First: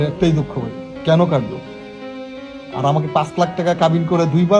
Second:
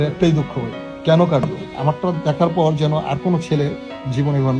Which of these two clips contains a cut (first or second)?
second